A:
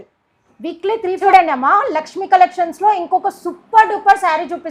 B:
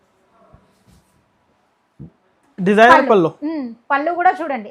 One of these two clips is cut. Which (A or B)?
A